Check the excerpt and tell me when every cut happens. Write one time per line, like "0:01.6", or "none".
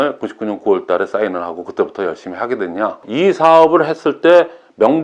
0:03.0